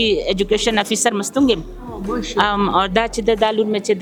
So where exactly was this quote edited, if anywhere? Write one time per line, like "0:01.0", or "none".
none